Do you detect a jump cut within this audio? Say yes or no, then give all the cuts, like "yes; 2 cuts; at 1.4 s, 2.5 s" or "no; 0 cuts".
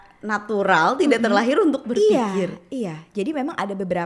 no; 0 cuts